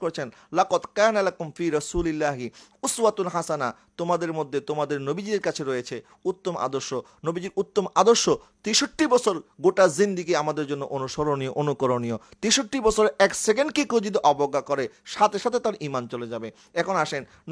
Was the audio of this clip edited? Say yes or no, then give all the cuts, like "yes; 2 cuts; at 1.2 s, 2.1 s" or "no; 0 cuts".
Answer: no; 0 cuts